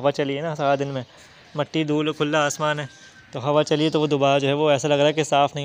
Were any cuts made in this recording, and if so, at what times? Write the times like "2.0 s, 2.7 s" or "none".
none

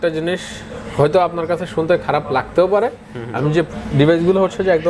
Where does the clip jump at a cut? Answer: 3.7 s

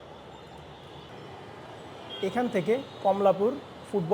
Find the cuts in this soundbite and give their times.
1.1 s

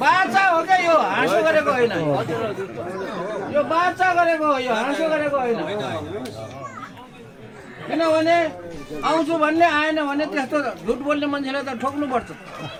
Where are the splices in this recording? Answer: none

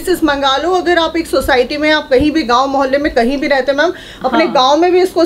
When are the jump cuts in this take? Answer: none

